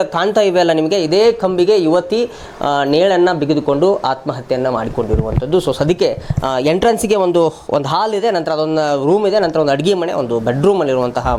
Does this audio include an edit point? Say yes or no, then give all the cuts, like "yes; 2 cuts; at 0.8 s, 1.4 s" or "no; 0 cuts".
no; 0 cuts